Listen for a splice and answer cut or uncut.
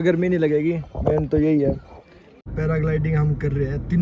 cut